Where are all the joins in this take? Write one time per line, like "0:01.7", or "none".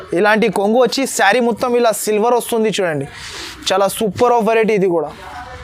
none